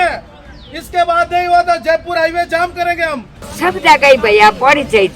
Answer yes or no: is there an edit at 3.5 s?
yes